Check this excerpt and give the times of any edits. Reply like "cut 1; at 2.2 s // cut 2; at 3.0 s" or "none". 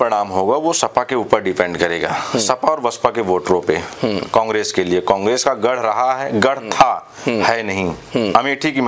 none